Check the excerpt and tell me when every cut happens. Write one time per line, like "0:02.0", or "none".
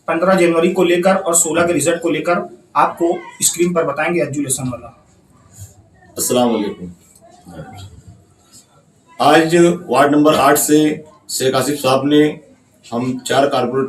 none